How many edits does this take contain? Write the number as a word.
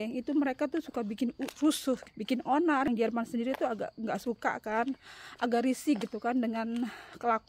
two